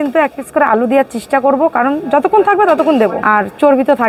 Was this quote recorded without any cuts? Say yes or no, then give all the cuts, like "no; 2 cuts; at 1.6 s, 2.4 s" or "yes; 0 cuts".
no; 1 cut; at 3.2 s